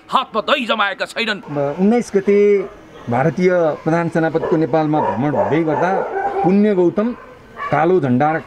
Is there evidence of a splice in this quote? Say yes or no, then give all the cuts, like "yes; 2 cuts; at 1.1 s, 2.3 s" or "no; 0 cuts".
yes; 1 cut; at 1.4 s